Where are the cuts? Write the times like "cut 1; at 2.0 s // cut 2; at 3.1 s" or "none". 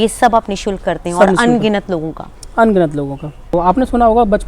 cut 1; at 3.5 s